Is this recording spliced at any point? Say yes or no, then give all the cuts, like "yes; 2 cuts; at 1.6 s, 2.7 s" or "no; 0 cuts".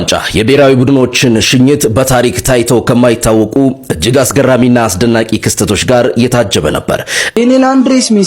yes; 1 cut; at 7.4 s